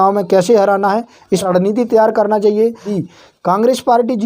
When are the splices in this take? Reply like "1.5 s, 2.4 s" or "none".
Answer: 1.5 s, 2.9 s